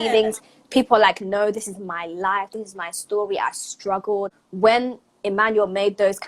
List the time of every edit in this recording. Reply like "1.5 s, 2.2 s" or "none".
4.4 s